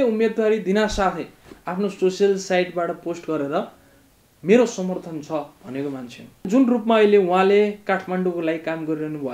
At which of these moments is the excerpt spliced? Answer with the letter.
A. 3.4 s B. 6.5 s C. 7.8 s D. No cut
B